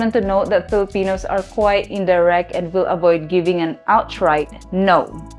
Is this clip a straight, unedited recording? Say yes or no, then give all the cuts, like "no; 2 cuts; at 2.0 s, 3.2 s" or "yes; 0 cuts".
yes; 0 cuts